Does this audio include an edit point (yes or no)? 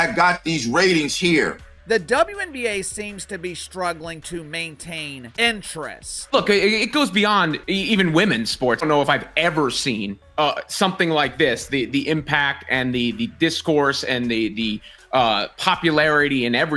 yes